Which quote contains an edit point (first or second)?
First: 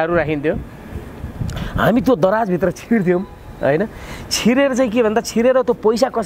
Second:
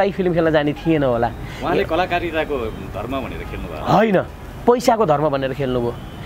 second